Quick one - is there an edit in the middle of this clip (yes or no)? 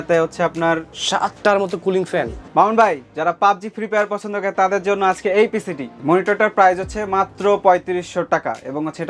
yes